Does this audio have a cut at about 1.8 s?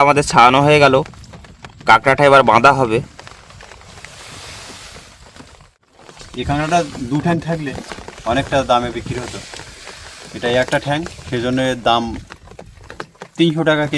no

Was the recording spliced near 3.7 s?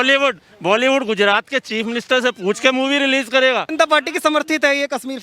yes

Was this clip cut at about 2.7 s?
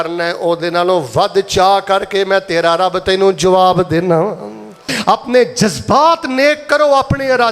no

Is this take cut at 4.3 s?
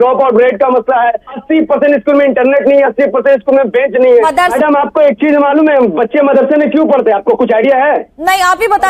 yes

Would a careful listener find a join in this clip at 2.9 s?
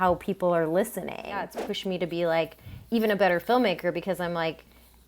no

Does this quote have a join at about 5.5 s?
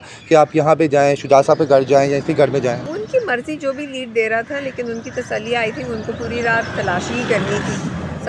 no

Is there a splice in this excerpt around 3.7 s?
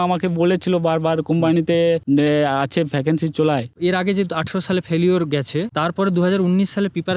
yes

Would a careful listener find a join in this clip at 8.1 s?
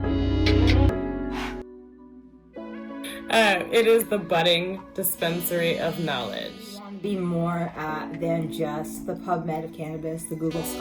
no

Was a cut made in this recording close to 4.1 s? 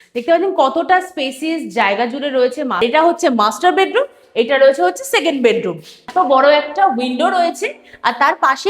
no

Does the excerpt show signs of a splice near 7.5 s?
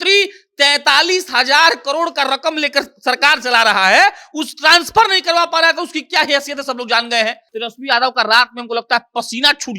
yes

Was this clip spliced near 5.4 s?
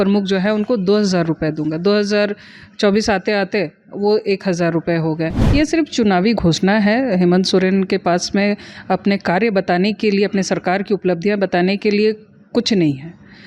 yes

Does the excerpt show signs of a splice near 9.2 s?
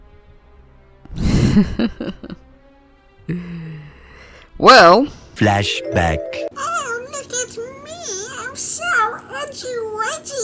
no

